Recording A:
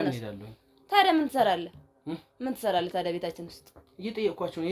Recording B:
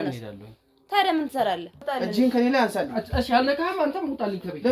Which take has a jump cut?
B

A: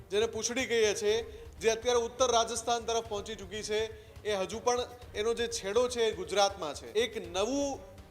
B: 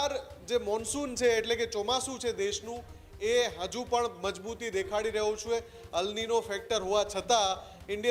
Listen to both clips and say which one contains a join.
A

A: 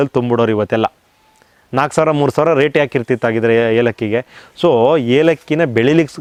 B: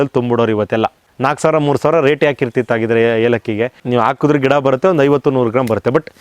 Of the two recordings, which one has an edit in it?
B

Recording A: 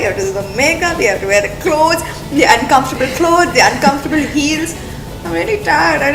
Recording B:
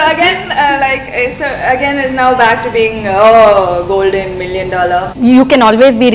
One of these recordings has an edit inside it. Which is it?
B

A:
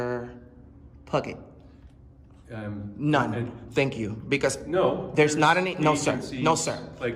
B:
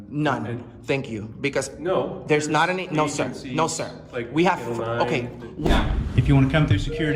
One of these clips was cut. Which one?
B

